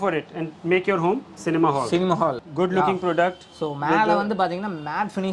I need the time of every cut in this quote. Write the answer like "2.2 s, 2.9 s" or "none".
2.4 s